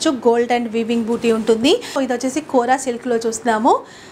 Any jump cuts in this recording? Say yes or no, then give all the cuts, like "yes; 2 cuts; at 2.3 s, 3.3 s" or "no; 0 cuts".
yes; 1 cut; at 1.9 s